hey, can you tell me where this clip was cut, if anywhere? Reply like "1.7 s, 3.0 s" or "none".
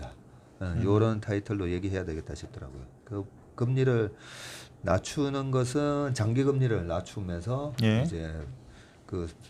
none